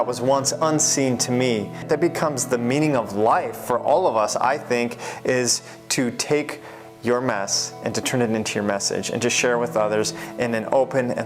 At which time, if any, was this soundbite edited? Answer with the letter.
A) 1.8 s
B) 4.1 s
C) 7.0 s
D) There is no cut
A